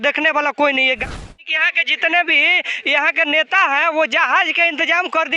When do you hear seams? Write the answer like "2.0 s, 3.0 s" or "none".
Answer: 1.0 s